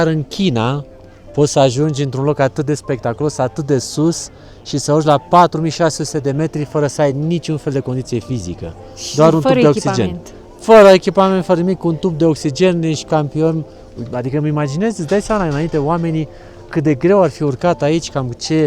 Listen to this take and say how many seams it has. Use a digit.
0